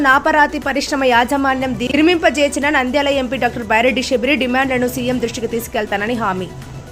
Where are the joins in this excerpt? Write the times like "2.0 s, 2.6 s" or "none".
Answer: none